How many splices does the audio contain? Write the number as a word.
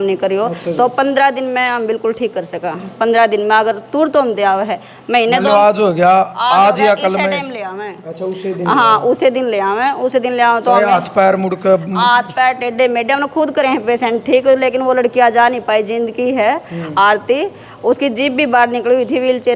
zero